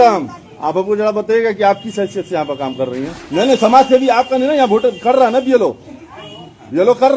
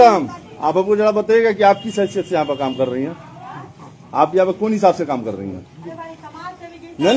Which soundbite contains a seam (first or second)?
first